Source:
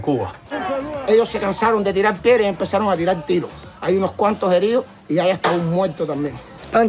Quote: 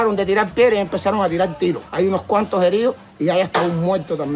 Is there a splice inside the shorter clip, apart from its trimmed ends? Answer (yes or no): yes